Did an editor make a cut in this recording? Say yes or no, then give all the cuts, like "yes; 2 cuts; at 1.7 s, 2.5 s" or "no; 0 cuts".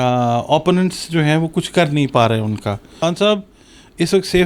yes; 1 cut; at 2.9 s